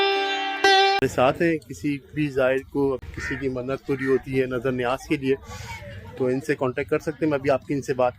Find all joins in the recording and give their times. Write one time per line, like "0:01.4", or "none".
0:01.0